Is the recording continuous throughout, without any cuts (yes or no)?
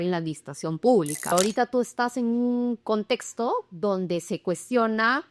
no